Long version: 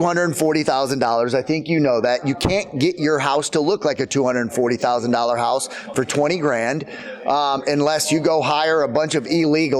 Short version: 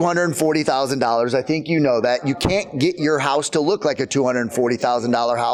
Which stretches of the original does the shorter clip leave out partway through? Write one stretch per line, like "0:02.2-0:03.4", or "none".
none